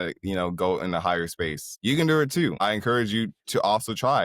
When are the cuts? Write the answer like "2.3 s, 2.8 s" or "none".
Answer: 1.6 s, 2.6 s